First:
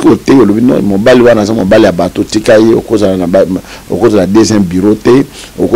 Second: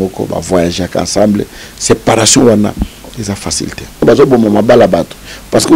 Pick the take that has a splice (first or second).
second